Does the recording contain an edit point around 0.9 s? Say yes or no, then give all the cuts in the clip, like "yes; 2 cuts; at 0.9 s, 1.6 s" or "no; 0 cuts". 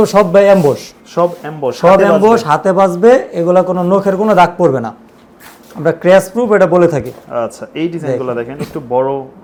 no; 0 cuts